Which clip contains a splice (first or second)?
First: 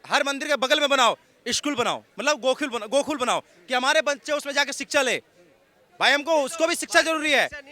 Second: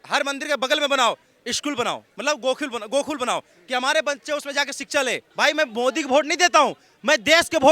second